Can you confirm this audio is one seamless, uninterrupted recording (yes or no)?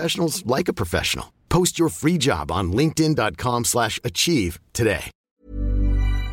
no